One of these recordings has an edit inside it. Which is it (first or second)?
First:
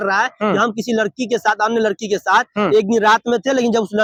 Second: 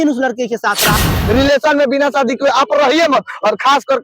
second